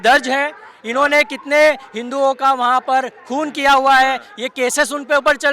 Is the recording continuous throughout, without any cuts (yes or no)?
yes